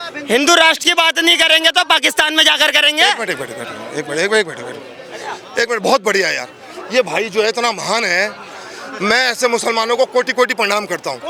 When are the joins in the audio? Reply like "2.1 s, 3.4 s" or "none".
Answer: none